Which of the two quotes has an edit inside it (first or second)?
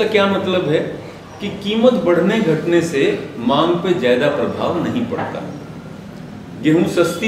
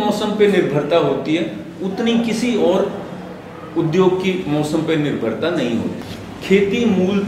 second